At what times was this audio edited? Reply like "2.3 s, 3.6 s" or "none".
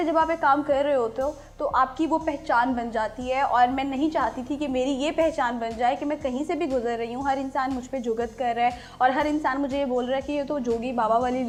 none